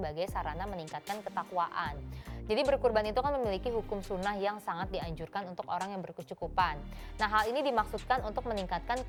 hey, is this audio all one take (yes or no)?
yes